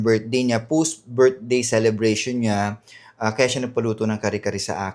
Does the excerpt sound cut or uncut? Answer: uncut